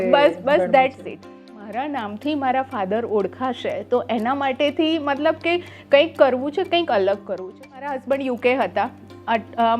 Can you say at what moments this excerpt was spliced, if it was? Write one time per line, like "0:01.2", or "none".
0:01.5
0:07.9